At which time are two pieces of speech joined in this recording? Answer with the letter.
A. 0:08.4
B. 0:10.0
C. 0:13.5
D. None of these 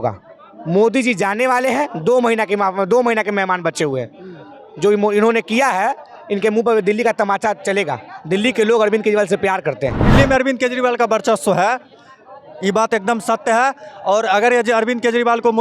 B